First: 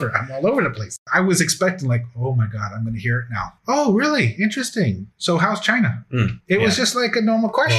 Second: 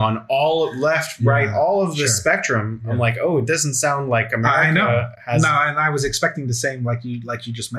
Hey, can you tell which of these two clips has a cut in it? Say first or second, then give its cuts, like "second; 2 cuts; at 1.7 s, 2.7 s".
first; 1 cut; at 1.0 s